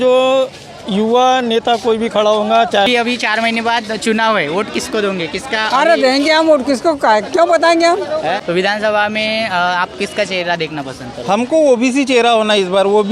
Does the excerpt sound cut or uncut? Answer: cut